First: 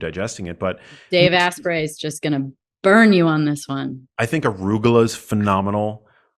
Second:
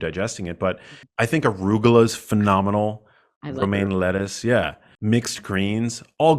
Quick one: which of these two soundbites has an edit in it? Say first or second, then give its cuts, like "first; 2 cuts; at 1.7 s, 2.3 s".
second; 1 cut; at 0.9 s